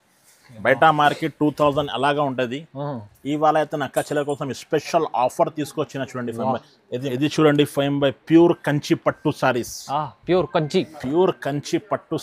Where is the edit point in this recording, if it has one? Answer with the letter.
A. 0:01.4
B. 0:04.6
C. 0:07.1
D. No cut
C